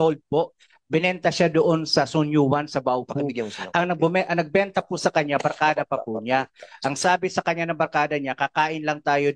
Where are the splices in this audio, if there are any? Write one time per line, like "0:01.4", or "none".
none

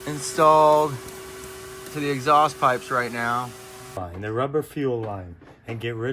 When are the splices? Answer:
0:03.9

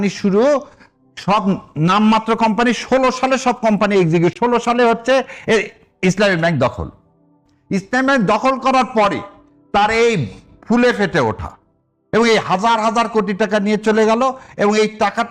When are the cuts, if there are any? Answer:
none

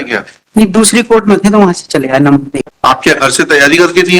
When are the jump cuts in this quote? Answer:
0:02.6

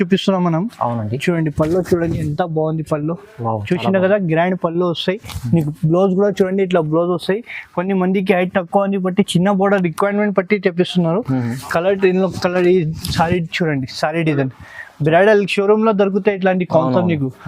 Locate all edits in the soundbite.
none

